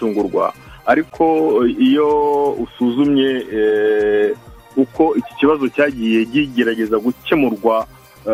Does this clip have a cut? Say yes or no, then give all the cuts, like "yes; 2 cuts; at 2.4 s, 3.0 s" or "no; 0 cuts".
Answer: no; 0 cuts